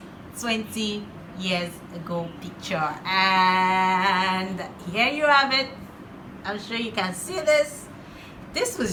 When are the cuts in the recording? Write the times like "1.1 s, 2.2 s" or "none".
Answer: none

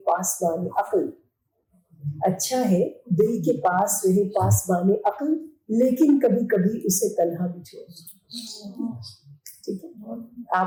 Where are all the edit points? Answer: none

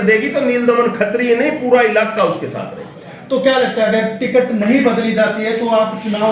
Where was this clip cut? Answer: none

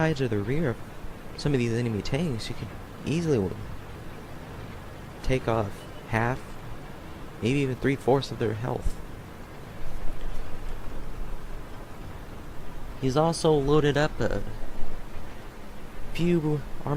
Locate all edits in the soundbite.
none

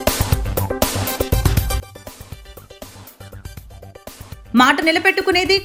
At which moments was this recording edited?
none

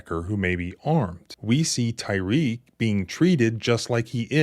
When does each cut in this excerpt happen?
1.3 s

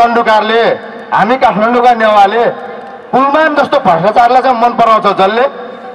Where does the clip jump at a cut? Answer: none

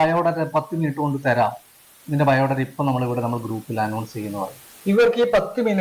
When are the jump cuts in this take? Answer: 0.9 s

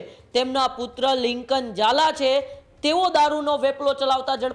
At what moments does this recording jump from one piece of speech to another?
none

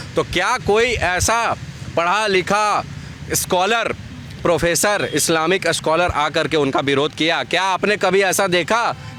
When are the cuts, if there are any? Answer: none

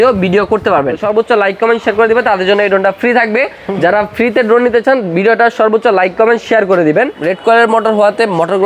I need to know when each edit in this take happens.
1.0 s, 7.2 s

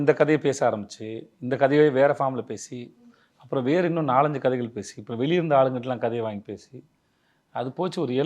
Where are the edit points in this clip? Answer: none

